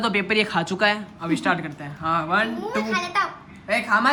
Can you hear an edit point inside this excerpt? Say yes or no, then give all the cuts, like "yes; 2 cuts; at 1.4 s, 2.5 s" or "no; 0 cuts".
no; 0 cuts